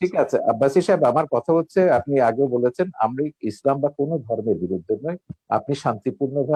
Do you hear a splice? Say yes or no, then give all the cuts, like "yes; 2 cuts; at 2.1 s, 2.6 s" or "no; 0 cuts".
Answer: no; 0 cuts